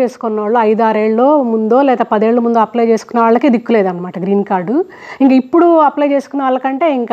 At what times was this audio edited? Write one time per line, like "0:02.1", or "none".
none

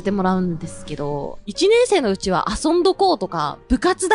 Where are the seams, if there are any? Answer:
none

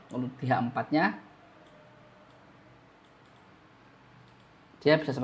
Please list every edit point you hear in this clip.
none

